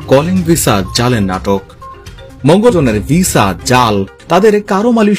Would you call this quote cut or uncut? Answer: cut